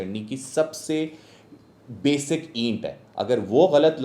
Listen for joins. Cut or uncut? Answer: uncut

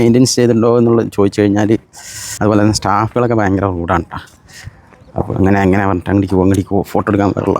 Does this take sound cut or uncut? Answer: cut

